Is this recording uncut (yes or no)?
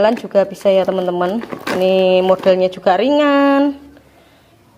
yes